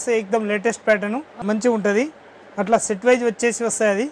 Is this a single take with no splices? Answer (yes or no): no